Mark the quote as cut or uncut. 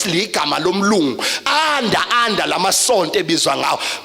uncut